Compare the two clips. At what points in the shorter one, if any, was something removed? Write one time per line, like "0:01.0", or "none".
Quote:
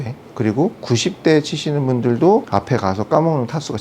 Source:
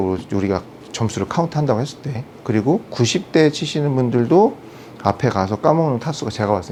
0:02.5